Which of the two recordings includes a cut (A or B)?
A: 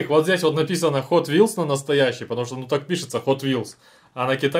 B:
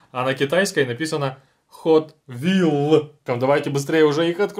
B